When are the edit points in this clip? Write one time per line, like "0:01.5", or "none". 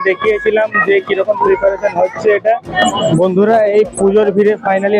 0:02.8